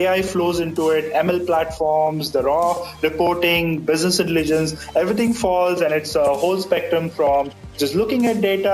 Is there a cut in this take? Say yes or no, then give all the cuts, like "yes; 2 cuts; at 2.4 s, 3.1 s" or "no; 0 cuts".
no; 0 cuts